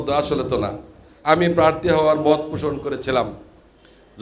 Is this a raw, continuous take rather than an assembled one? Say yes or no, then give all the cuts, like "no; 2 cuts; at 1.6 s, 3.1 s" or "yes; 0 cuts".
no; 1 cut; at 1.1 s